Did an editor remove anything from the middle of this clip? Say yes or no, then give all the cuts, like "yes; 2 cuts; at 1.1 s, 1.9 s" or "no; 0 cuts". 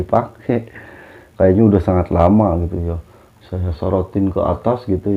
no; 0 cuts